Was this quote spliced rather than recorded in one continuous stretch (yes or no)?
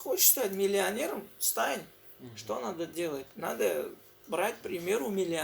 no